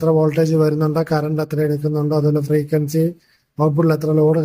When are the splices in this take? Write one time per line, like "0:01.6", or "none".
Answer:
none